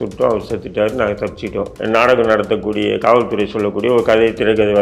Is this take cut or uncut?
cut